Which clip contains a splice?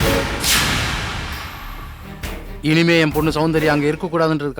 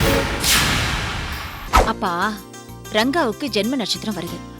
second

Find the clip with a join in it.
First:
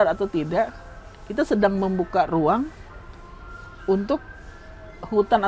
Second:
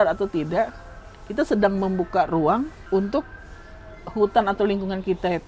second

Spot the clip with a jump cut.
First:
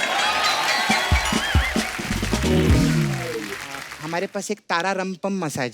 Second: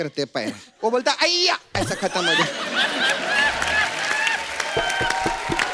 first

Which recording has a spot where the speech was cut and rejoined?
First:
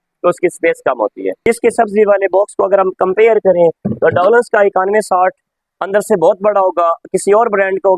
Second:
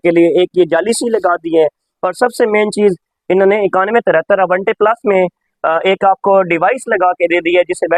first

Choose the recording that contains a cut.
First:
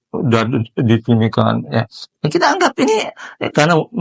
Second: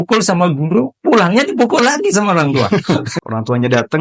second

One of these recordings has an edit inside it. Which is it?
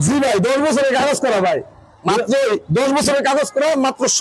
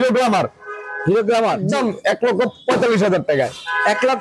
second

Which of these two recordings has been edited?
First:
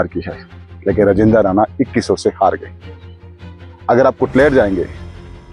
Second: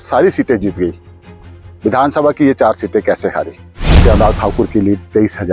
second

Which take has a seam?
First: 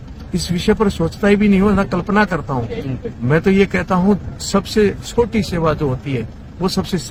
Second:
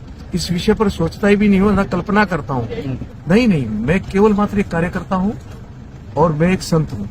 second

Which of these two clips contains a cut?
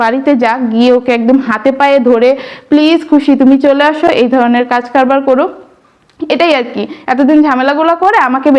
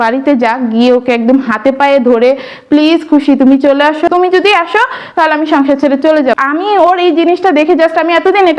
second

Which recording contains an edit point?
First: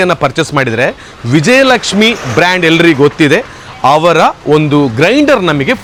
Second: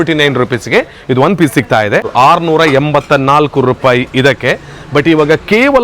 second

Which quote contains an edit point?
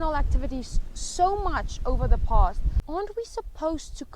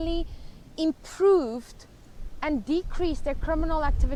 first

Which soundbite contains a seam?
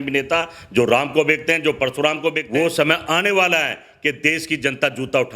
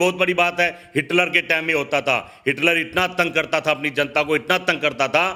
first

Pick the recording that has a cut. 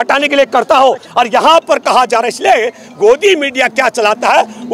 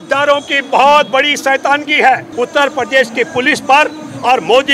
second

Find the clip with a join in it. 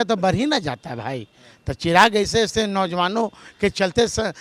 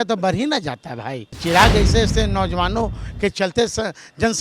second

